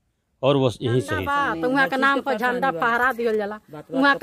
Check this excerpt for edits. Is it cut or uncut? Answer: cut